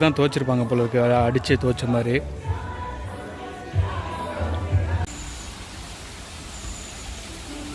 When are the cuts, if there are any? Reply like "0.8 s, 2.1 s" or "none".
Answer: none